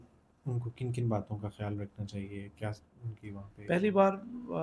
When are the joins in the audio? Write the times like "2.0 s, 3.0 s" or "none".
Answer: none

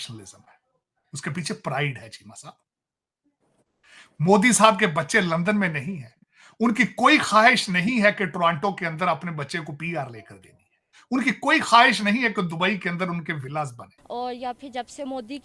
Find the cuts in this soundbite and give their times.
13.9 s

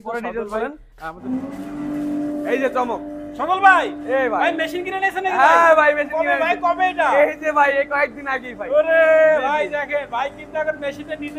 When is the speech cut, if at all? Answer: 1.2 s

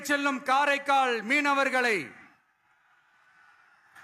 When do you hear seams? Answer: none

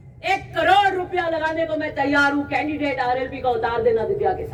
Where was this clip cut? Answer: none

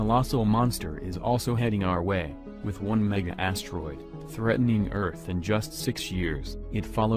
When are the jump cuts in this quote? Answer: 2.7 s

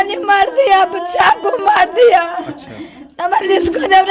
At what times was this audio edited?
none

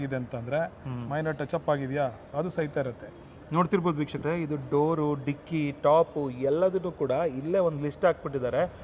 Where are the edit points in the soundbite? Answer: none

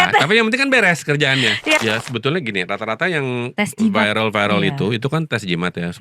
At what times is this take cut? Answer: 1.8 s

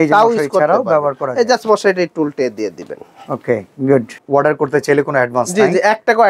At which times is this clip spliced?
4.2 s

